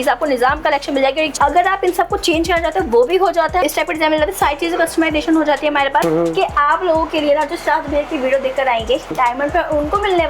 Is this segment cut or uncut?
cut